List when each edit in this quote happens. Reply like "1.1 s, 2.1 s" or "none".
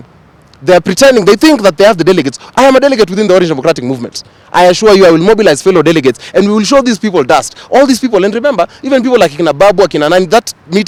none